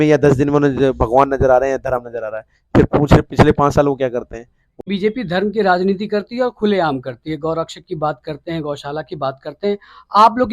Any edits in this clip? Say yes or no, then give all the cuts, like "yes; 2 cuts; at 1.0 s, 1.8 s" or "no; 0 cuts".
yes; 1 cut; at 4.8 s